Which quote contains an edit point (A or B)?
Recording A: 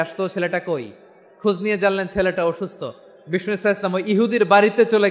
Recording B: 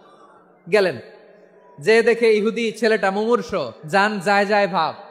B